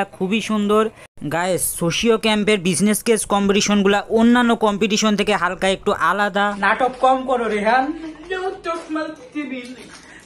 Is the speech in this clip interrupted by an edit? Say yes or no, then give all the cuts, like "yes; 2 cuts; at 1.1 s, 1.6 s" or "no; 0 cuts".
yes; 2 cuts; at 1.2 s, 6.6 s